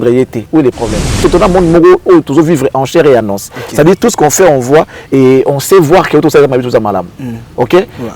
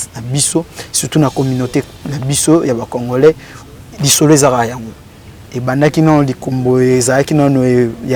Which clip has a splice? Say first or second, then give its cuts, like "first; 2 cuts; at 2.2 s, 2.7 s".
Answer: first; 1 cut; at 1.2 s